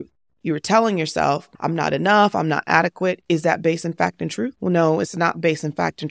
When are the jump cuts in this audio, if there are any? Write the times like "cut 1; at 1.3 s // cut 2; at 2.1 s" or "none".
cut 1; at 1.5 s // cut 2; at 4.6 s